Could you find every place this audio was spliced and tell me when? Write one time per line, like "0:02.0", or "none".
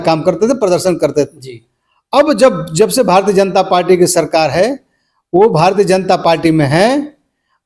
none